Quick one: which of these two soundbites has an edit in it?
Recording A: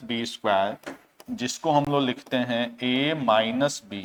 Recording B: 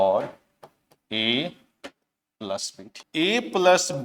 B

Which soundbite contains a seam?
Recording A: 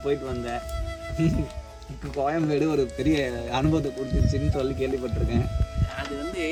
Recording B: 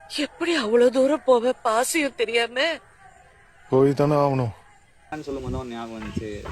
B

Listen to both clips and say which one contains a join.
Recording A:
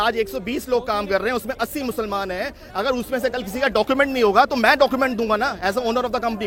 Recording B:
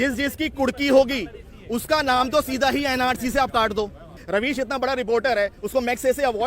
B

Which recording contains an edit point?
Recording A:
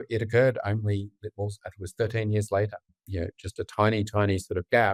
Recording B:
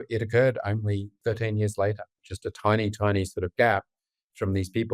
B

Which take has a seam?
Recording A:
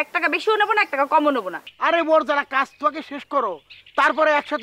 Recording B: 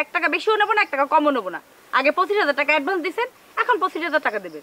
A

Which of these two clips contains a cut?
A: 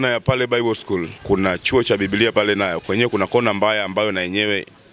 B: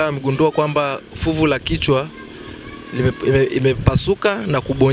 A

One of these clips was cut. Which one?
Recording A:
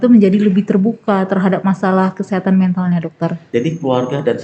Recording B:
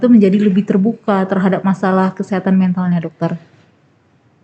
A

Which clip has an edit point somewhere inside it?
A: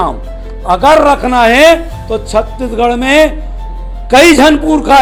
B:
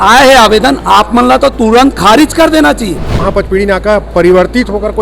B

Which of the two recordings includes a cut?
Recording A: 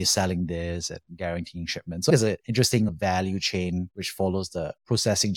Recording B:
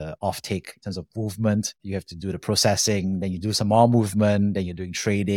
A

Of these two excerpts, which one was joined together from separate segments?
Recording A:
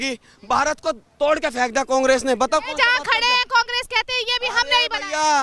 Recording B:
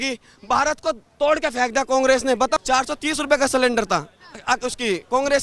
B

